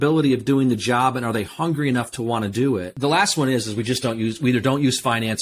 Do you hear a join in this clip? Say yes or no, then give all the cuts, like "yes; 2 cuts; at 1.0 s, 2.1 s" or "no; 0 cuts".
yes; 1 cut; at 2.9 s